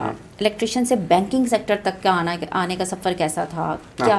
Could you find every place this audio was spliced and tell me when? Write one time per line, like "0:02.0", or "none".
none